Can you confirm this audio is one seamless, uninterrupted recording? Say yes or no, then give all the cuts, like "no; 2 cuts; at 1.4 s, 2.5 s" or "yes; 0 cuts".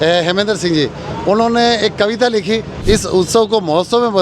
no; 1 cut; at 2.7 s